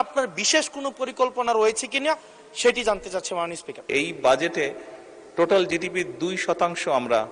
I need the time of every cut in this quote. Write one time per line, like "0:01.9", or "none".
0:03.9